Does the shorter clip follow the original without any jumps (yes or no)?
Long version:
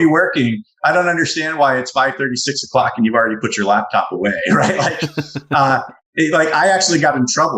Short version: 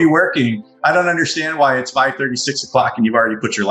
yes